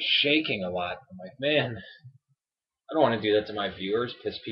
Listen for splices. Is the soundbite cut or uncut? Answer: cut